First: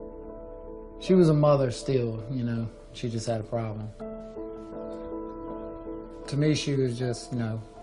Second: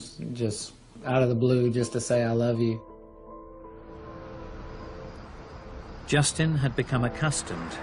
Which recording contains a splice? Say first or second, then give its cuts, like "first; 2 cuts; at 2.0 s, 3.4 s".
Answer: first; 1 cut; at 3.5 s